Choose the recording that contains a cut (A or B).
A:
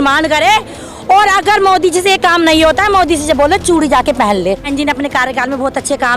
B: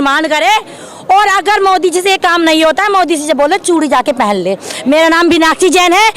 A